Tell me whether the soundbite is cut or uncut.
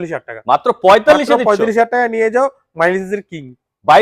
uncut